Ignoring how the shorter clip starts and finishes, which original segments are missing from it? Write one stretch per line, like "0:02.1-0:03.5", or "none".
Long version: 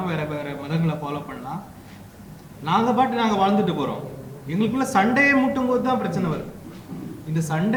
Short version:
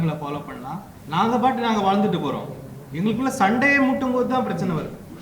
0:01.7-0:02.5